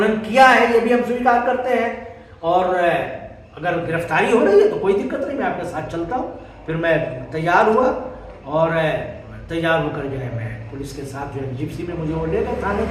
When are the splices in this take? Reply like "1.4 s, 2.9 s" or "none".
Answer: none